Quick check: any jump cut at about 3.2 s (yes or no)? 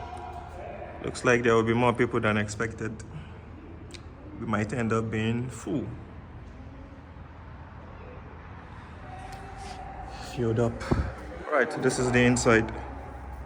no